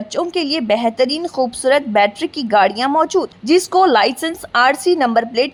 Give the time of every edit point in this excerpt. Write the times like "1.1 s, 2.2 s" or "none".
none

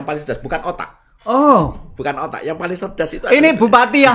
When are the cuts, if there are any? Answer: none

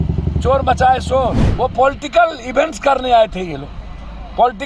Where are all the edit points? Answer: 1.4 s

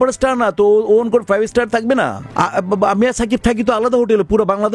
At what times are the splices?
2.2 s

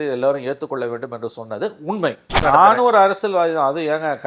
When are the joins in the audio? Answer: 2.4 s

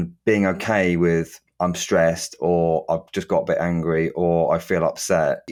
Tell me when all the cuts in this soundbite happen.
none

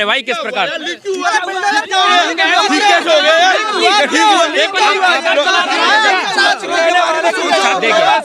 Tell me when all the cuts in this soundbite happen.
none

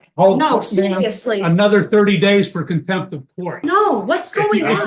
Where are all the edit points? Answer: 3.4 s

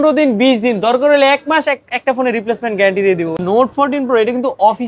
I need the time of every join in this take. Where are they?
3.4 s

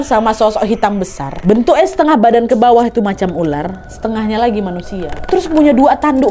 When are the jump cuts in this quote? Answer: 5.2 s

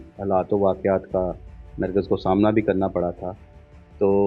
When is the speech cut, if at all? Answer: none

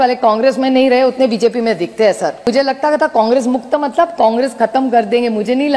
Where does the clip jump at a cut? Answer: 2.4 s

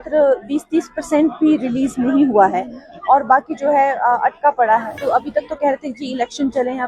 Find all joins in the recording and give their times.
5.0 s

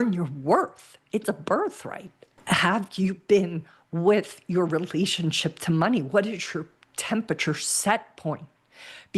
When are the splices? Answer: 2.3 s

